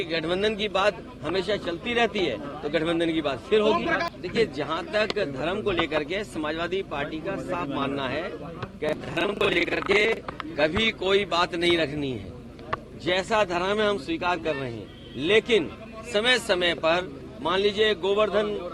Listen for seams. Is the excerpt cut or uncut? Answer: cut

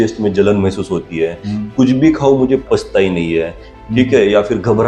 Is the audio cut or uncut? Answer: cut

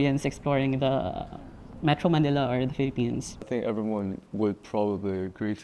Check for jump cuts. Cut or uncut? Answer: cut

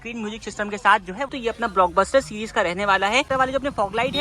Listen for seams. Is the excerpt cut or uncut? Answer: cut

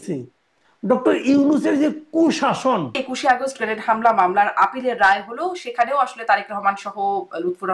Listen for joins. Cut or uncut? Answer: cut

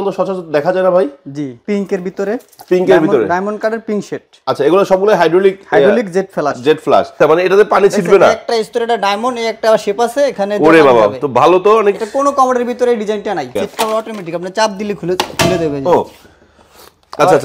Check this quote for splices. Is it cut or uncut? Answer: cut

